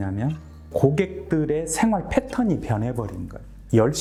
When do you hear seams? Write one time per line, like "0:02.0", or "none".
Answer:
none